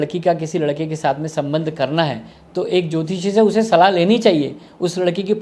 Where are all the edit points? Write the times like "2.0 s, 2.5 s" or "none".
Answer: none